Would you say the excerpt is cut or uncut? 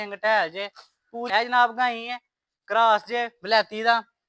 cut